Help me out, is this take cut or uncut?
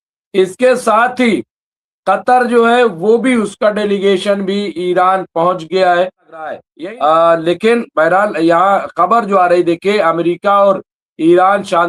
cut